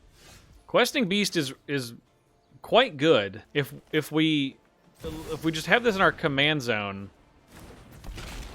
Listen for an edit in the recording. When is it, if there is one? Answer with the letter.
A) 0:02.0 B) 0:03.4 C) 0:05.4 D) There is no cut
B